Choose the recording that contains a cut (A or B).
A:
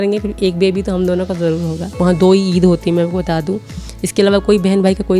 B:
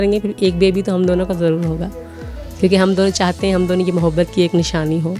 A